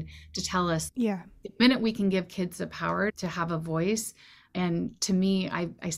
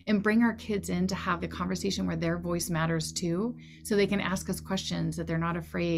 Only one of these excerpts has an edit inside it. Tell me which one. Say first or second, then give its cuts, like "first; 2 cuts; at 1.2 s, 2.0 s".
first; 2 cuts; at 0.9 s, 3.1 s